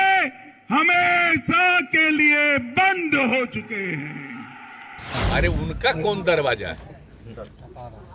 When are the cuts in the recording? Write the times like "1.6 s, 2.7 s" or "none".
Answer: 5.2 s

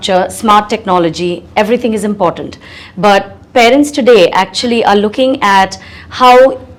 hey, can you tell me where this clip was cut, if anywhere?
none

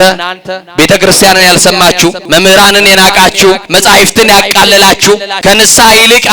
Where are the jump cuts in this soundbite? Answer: 2.2 s, 3.6 s, 5.3 s

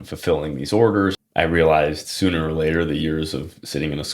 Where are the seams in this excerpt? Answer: 1.1 s

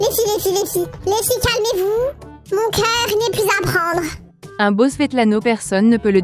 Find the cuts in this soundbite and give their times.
none

